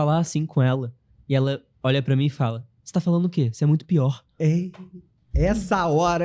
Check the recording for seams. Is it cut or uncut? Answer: uncut